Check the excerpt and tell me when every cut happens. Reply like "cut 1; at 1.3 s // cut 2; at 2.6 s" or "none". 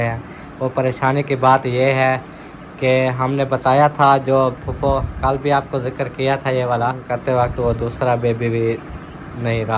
cut 1; at 7.0 s